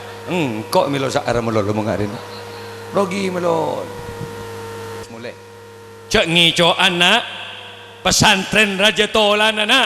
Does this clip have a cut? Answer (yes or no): yes